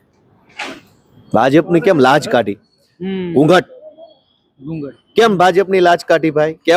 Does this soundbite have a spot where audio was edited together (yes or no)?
no